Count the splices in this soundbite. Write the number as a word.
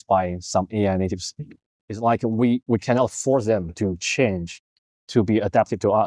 one